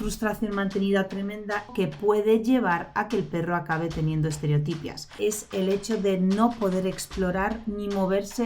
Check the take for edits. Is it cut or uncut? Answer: cut